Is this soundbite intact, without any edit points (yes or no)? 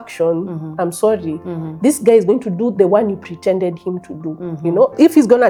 yes